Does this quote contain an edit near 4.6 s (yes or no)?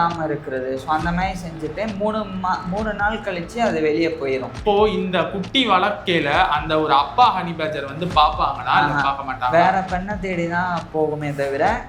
yes